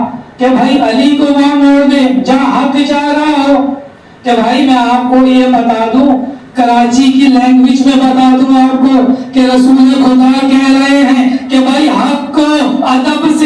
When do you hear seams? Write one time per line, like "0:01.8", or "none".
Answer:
none